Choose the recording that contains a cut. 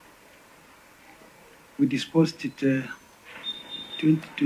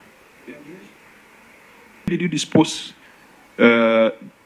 second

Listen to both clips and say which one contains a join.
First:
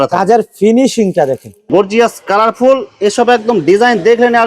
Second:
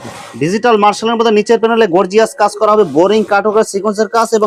first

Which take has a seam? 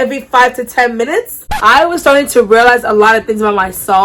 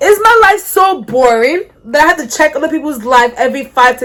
first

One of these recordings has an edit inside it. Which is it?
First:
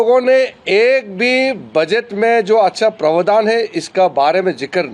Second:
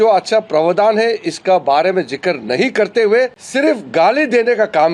second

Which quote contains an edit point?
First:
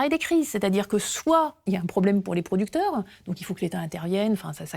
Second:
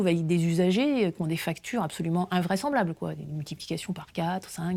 first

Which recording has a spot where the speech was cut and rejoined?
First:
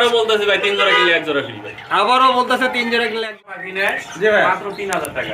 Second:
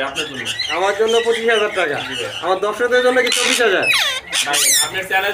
first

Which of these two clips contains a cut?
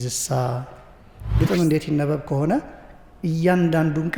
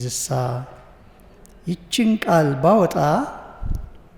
first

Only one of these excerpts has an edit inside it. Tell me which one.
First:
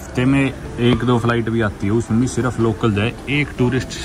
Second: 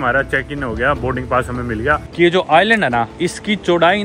second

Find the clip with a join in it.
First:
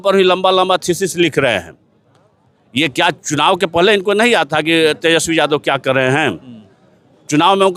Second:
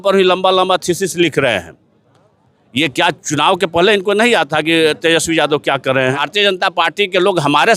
second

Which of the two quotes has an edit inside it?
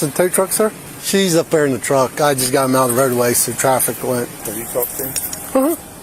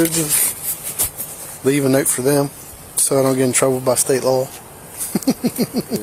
first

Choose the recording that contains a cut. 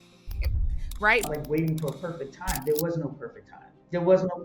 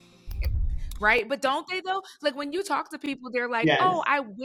first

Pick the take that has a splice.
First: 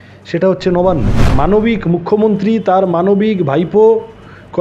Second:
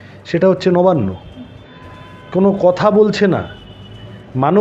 first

